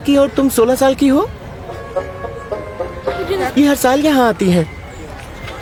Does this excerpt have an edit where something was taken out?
no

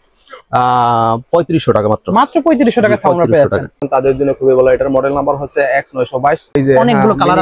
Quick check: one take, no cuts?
no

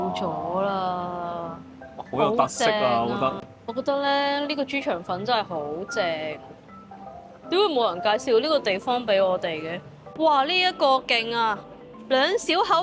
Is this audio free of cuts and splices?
no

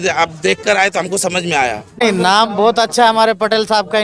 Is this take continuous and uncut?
no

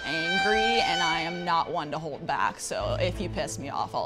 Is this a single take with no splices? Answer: yes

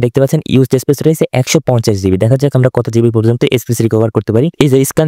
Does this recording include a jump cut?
no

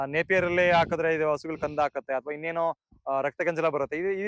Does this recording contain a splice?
no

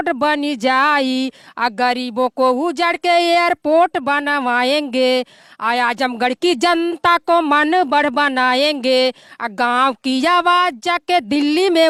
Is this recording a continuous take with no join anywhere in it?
yes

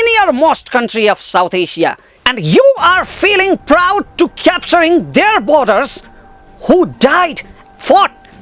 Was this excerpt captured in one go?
no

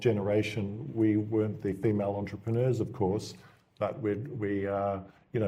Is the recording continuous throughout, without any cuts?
yes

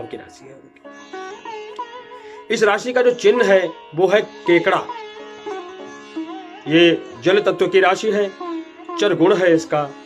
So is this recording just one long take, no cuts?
yes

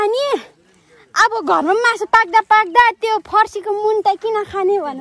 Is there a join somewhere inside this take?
no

